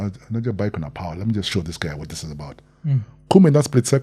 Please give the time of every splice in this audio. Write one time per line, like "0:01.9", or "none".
none